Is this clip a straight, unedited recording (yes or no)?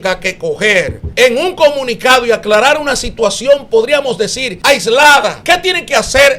no